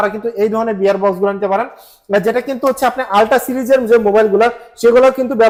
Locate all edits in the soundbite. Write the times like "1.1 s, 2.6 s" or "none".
none